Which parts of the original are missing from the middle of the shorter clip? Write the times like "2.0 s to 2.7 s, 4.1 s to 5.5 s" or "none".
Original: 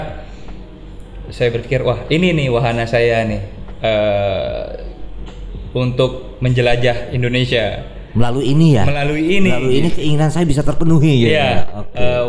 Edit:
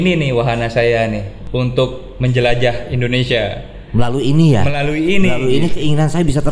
3.5 s to 5.6 s